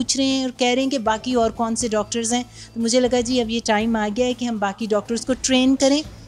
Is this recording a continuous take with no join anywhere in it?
yes; 0 cuts

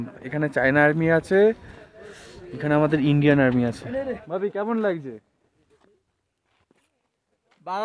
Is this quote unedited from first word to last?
no; 1 cut; at 4.2 s

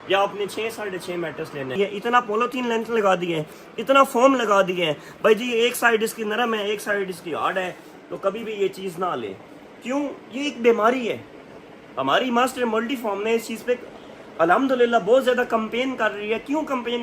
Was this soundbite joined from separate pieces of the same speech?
yes; 1 cut; at 1.8 s

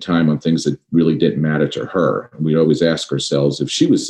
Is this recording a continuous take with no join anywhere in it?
yes; 0 cuts

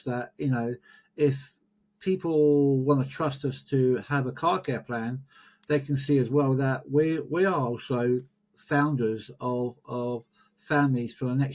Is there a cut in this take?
no; 0 cuts

